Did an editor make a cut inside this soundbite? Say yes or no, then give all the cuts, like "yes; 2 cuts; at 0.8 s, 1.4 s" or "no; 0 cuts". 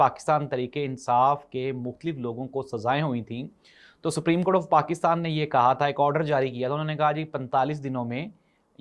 no; 0 cuts